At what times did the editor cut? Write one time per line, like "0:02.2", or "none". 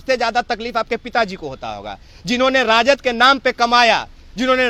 none